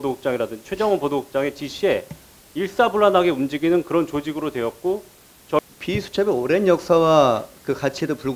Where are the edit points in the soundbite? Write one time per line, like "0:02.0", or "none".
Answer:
0:05.6